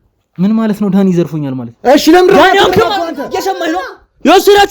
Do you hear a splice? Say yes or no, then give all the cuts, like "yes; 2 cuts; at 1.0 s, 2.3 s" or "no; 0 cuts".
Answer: yes; 1 cut; at 1.7 s